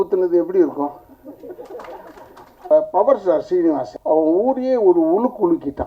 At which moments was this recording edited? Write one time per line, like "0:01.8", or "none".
0:02.7
0:03.9